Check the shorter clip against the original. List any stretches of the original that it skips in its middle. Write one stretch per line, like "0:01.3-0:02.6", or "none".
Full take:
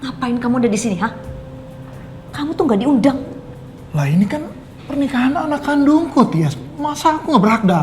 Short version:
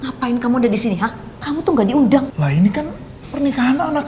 0:01.3-0:02.2
0:03.2-0:03.9